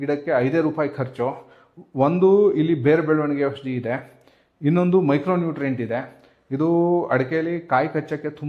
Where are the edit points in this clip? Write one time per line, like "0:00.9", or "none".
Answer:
none